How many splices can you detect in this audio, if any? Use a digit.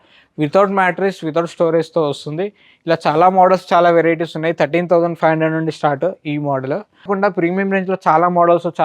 1